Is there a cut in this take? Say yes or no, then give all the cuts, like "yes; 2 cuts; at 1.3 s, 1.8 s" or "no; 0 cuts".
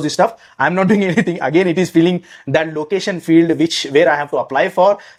no; 0 cuts